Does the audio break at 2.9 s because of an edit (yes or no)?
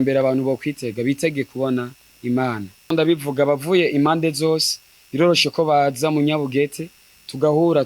yes